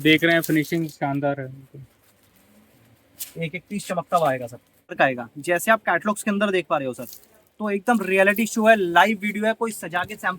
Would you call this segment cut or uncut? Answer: cut